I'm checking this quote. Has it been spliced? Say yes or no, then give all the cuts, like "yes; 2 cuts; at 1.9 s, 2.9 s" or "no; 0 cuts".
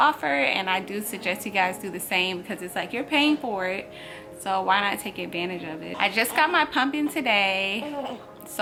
no; 0 cuts